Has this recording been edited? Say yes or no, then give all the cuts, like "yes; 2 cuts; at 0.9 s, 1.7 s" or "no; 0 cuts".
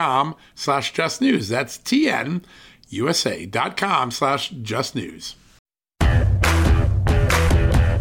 yes; 1 cut; at 5.8 s